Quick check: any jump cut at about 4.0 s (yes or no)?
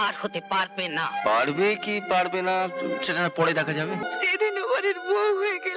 yes